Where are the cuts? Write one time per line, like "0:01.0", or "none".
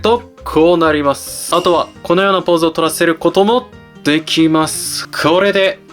0:01.3
0:05.0

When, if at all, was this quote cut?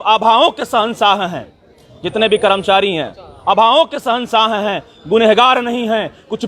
none

